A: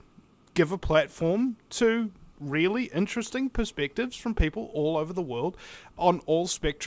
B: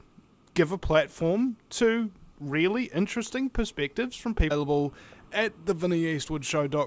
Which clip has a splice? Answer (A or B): A